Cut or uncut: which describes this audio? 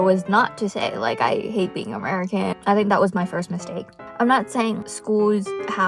cut